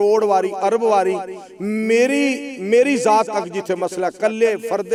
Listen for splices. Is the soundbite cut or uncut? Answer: uncut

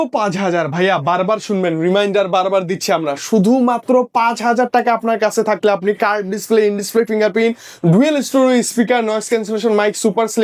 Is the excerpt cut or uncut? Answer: uncut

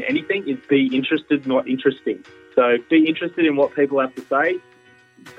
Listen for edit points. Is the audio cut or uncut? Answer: cut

